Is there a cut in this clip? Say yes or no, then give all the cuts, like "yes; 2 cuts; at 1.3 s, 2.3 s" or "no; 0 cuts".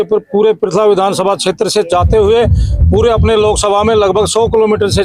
no; 0 cuts